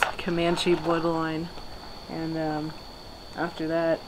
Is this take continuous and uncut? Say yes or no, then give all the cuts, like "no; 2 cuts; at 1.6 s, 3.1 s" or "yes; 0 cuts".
yes; 0 cuts